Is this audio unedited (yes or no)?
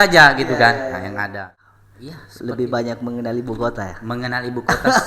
no